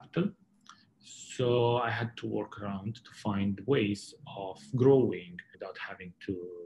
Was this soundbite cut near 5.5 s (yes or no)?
yes